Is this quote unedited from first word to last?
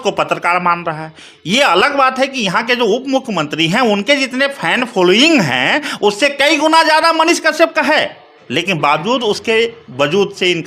yes; 0 cuts

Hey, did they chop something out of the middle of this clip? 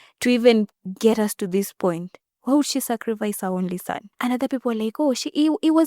yes; 1 cut; at 4.0 s

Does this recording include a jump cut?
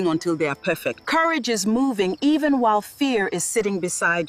yes; 1 cut; at 0.9 s

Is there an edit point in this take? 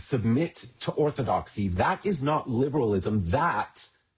yes; 1 cut; at 1.7 s

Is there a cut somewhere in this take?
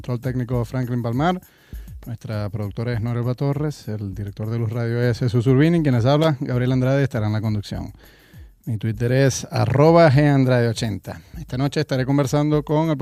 no; 0 cuts

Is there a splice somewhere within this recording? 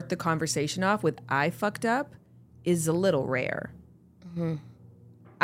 no; 0 cuts

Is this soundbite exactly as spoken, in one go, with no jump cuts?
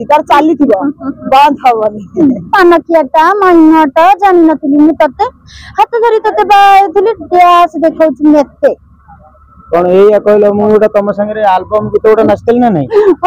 no; 1 cut; at 2.5 s

